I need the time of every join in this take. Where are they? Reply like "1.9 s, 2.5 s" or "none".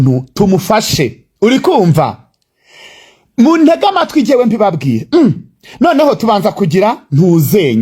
none